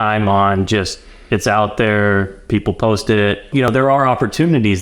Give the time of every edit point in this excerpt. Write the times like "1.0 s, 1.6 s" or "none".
3.7 s